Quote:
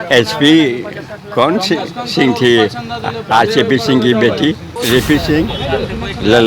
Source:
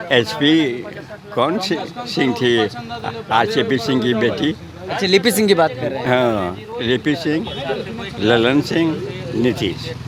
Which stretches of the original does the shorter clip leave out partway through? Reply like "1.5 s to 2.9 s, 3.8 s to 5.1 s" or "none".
4.7 s to 6.7 s